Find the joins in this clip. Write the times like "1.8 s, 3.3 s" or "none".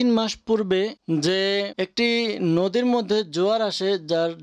1.0 s, 1.7 s